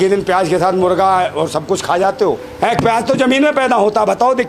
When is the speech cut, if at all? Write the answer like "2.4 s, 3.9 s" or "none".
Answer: 2.5 s